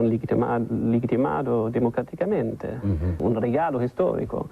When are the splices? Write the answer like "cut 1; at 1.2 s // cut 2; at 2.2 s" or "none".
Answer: cut 1; at 3.2 s